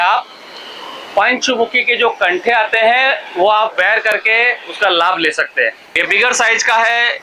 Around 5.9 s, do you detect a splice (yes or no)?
yes